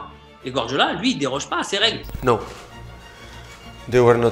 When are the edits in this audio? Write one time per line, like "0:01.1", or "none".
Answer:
0:02.1